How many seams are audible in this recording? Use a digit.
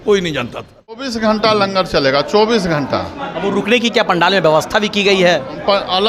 1